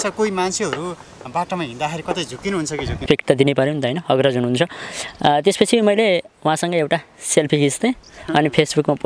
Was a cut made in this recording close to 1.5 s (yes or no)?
no